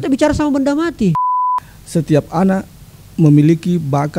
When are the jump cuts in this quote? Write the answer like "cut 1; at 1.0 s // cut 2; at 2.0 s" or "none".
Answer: cut 1; at 1.2 s